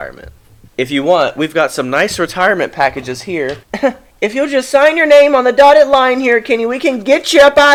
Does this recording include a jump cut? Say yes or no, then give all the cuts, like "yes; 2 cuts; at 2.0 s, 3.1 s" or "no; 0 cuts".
no; 0 cuts